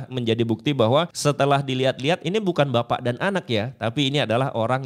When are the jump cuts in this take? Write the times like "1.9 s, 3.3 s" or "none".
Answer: 1.1 s